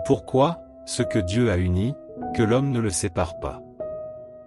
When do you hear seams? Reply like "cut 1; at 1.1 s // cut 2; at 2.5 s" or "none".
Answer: cut 1; at 3.4 s